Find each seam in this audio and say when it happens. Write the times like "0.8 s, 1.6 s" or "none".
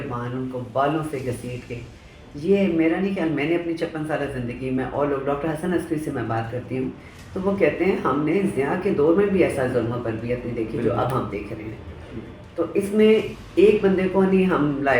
none